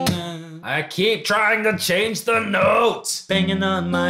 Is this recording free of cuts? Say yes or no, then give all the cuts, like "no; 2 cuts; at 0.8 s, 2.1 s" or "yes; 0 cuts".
no; 1 cut; at 3.2 s